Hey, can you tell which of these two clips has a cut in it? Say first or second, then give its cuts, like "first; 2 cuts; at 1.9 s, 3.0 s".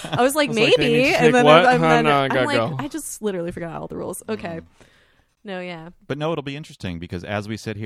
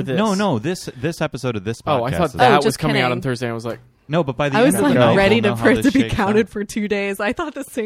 first; 1 cut; at 5.4 s